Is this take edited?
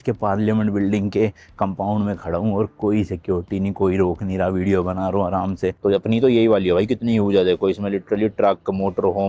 yes; 1 cut; at 5.8 s

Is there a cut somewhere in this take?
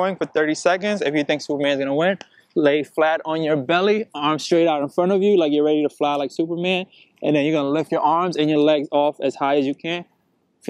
yes; 2 cuts; at 1.5 s, 7.9 s

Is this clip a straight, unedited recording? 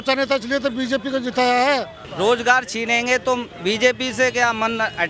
no; 1 cut; at 2.0 s

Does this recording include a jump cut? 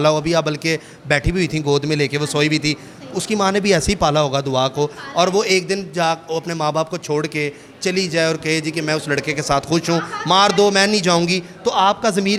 no; 0 cuts

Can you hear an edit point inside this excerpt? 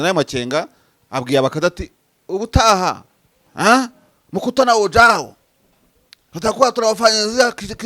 no; 0 cuts

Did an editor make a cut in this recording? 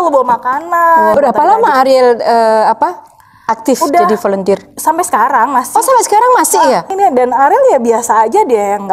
yes; 2 cuts; at 1.1 s, 6.8 s

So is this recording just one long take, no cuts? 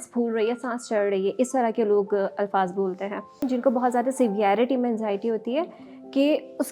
no; 1 cut; at 3.4 s

